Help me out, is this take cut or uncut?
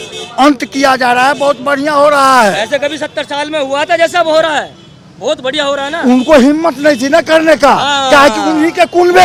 uncut